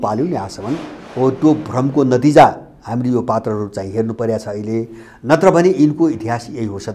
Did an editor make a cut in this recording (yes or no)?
no